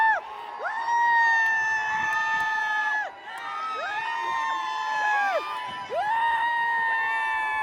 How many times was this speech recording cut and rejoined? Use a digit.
0